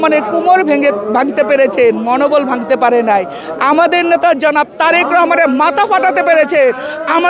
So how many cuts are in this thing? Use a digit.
0